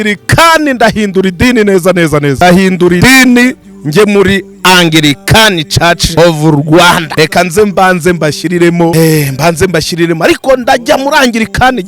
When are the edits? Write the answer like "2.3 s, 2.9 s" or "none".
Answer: 2.4 s, 3.0 s, 6.1 s, 7.1 s, 8.9 s